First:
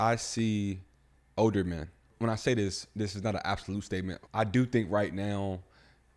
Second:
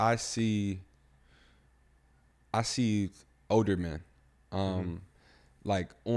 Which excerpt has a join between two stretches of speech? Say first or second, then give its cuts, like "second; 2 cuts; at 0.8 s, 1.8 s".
first; 3 cuts; at 1.1 s, 2.1 s, 4.2 s